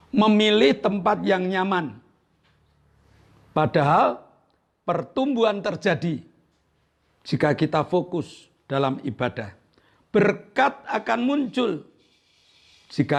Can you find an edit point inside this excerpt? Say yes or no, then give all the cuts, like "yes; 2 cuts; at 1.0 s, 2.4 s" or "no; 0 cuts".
no; 0 cuts